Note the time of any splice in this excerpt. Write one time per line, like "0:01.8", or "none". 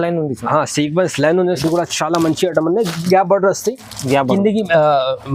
0:01.6